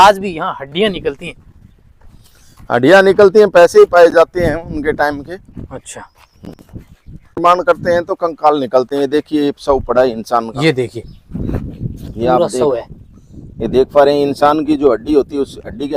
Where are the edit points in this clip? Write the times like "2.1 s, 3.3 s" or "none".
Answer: none